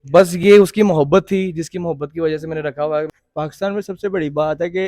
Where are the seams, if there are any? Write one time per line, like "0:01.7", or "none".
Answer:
0:03.1